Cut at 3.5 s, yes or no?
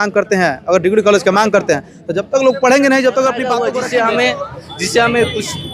yes